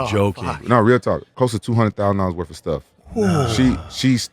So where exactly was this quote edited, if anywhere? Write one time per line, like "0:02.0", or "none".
0:01.3